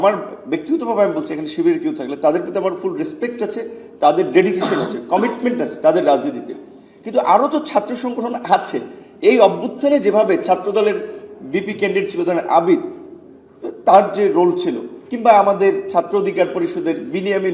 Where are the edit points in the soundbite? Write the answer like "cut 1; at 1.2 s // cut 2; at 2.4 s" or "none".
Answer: none